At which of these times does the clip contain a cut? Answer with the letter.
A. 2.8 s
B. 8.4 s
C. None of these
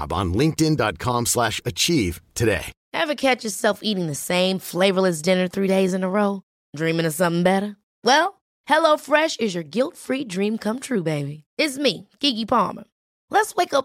A